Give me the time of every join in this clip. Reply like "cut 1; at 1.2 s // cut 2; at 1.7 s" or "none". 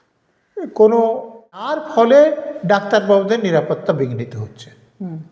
cut 1; at 1.8 s